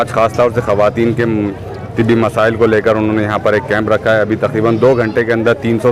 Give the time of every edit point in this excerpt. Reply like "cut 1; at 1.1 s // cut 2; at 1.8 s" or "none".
none